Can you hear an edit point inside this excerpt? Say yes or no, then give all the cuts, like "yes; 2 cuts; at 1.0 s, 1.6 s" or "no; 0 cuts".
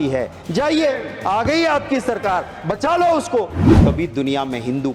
yes; 1 cut; at 3.6 s